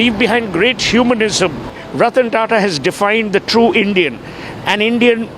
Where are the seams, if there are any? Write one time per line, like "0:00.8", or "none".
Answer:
0:01.8